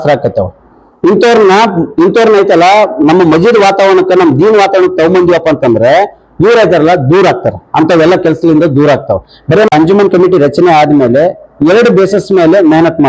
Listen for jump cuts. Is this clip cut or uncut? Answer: cut